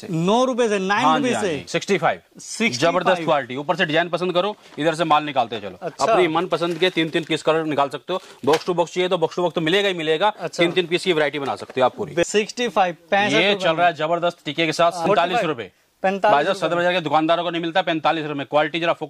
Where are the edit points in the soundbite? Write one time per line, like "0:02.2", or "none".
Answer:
0:01.7
0:12.2
0:15.1